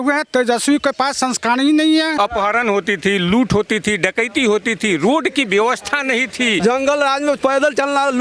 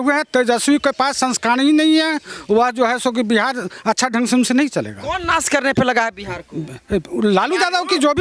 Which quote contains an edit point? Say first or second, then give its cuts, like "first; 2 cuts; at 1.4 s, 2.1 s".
first; 2 cuts; at 2.1 s, 6.6 s